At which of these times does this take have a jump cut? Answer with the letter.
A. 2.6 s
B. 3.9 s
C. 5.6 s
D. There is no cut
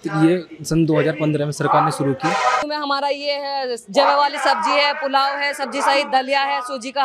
A